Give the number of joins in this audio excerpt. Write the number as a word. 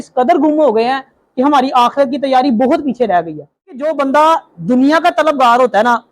one